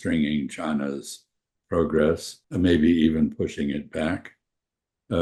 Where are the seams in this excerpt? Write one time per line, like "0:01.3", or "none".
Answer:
0:02.4